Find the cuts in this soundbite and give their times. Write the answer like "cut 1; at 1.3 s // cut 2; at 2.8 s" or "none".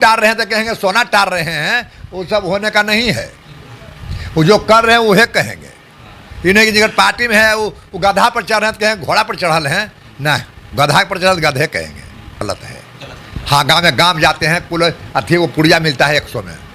cut 1; at 12.4 s